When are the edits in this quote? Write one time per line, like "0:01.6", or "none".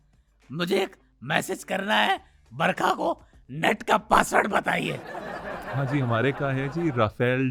none